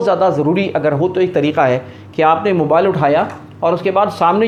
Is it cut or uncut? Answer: uncut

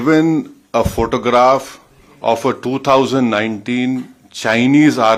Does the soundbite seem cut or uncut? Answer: uncut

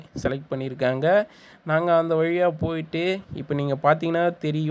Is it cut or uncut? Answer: uncut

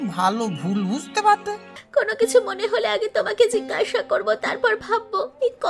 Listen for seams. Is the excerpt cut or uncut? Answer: cut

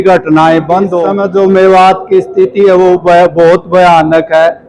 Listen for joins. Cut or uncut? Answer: cut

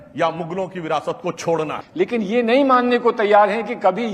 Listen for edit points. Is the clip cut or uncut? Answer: cut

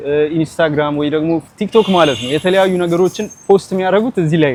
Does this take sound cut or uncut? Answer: uncut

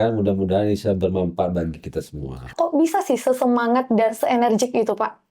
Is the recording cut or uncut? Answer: cut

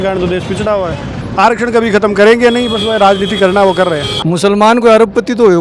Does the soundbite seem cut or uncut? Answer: cut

